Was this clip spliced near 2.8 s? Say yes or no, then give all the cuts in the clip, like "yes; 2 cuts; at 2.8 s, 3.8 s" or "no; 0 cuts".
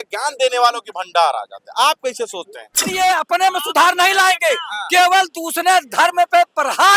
yes; 1 cut; at 2.8 s